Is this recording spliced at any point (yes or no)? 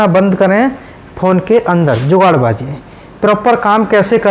no